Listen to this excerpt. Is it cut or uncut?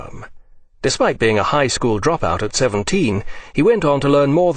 cut